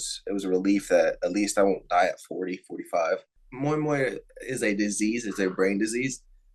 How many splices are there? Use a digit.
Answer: 1